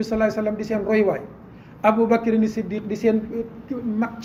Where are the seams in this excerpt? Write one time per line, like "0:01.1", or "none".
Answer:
none